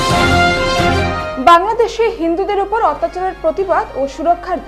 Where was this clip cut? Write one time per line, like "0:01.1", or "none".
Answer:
none